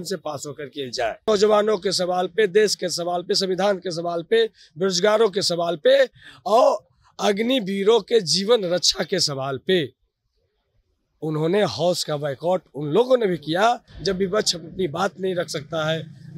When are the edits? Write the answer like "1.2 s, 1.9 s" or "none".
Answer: 1.2 s, 13.9 s

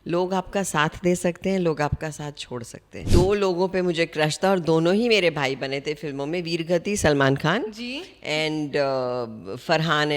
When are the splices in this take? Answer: 3.0 s

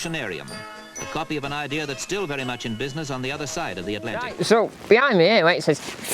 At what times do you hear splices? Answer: 4.2 s

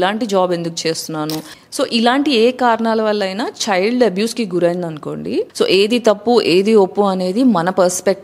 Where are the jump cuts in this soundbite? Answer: 1.5 s, 5.5 s

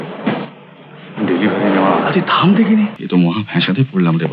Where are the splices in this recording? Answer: 3.0 s

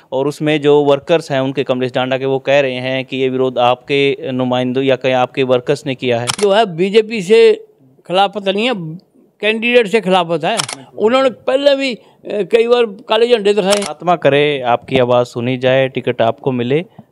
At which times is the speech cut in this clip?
6.4 s, 10.8 s, 13.9 s

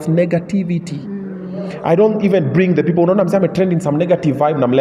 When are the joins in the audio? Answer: none

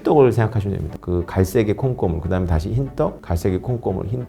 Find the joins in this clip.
1.0 s

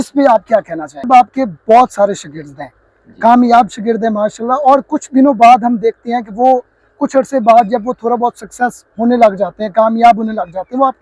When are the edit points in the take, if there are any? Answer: 1.1 s

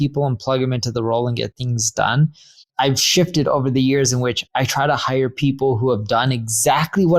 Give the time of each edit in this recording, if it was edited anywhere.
2.7 s

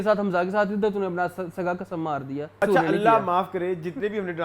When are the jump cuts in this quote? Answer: 2.6 s

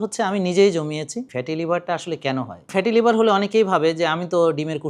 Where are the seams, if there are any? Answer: 1.3 s, 2.7 s

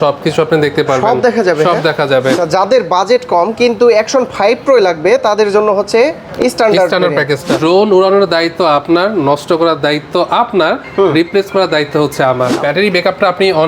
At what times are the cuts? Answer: 2.3 s, 7.5 s, 12.6 s

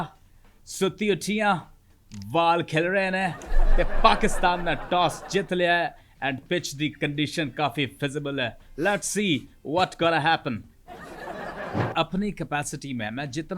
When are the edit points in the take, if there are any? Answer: 11.9 s

